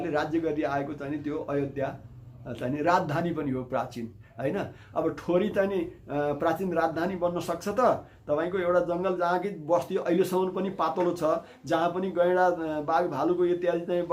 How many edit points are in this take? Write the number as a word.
zero